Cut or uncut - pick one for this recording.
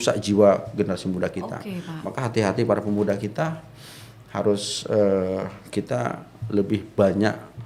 uncut